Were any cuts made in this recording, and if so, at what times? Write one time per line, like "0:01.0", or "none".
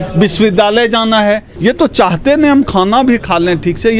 0:01.5